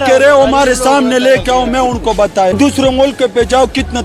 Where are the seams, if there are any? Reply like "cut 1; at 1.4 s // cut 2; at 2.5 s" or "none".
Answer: cut 1; at 2.6 s